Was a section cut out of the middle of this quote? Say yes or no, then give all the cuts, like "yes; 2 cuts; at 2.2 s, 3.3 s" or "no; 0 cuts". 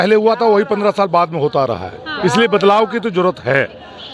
no; 0 cuts